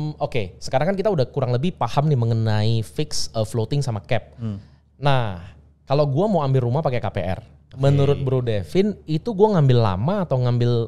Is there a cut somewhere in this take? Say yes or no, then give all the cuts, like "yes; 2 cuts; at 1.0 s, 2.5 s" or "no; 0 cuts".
no; 0 cuts